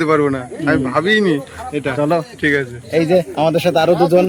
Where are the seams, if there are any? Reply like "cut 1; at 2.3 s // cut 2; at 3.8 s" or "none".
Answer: none